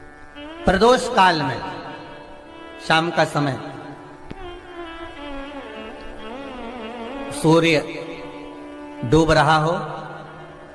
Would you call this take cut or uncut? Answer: uncut